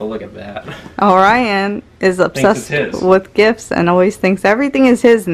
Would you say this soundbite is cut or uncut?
uncut